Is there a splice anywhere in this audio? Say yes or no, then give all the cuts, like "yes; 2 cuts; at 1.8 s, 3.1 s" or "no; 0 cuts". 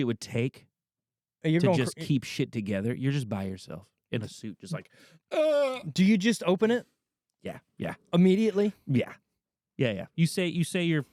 no; 0 cuts